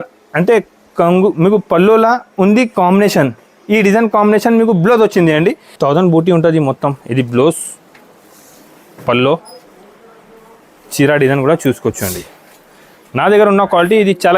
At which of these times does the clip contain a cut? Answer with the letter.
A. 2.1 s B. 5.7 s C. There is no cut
B